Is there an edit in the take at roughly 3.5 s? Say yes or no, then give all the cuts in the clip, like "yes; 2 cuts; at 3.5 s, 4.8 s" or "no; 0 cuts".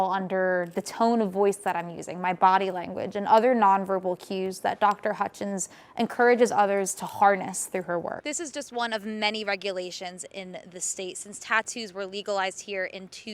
no; 1 cut; at 8.2 s